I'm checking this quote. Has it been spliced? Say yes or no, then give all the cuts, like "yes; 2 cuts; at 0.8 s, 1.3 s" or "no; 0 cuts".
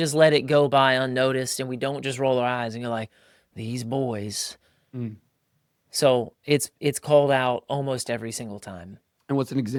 no; 0 cuts